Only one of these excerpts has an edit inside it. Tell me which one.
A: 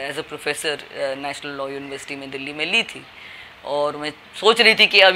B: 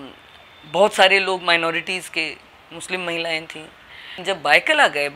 B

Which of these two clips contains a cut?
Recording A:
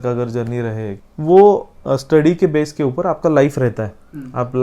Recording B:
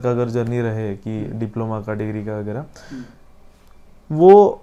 A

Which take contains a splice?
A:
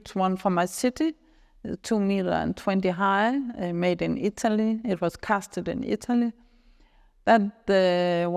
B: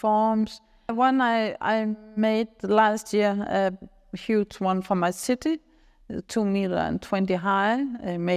B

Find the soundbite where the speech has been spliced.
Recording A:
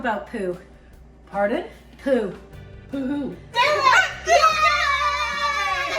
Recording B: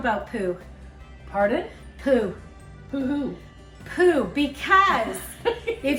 A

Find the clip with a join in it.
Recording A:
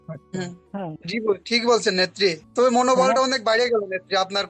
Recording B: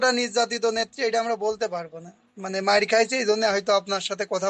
A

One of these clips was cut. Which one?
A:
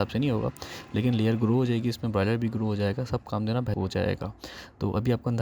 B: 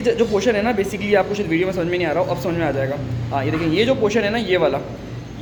A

